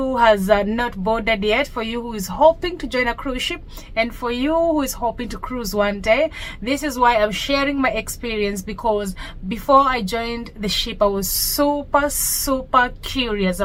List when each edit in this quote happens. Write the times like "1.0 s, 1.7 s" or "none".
none